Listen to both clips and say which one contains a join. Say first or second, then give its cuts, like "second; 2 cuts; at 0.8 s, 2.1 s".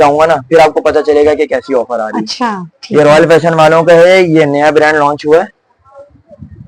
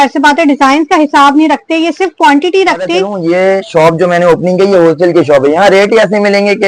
second; 1 cut; at 3.1 s